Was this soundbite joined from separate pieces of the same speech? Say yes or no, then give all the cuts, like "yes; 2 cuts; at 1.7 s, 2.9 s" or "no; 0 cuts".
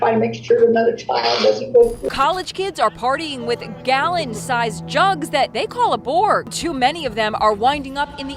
yes; 2 cuts; at 2.1 s, 6.5 s